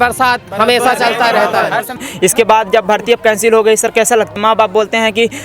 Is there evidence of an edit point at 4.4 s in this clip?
yes; 2 cuts; at 2.0 s, 4.4 s

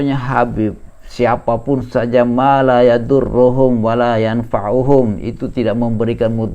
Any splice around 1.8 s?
no; 0 cuts

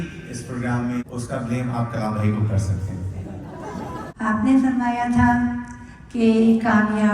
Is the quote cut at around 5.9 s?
no; 2 cuts; at 1.1 s, 4.1 s

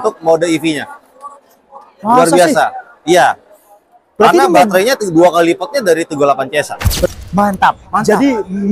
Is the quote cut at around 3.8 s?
no; 1 cut; at 7.1 s

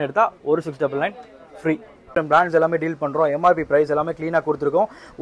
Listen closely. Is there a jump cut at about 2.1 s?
yes; 1 cut; at 2.1 s

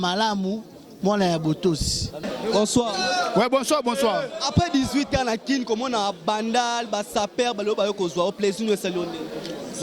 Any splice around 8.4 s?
no; 1 cut; at 2.3 s

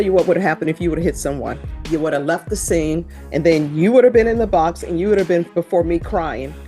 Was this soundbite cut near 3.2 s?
yes; 3 cuts; at 1.7 s, 3.2 s, 5.5 s

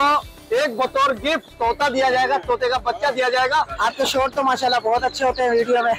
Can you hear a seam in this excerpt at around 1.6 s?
no; 1 cut; at 3.7 s

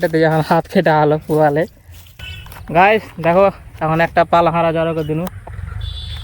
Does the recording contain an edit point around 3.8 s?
no; 1 cut; at 2.3 s

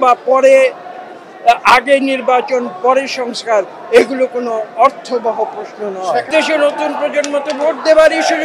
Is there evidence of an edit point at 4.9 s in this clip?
no; 1 cut; at 6.3 s

